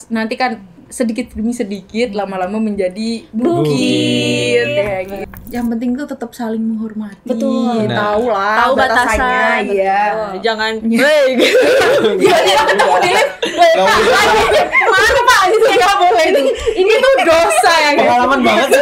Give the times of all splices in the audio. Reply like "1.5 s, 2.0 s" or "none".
5.3 s